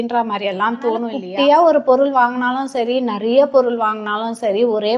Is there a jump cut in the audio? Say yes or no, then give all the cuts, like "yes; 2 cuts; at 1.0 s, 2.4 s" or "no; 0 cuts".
yes; 1 cut; at 1.2 s